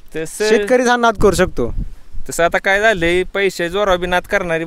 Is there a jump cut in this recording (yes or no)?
no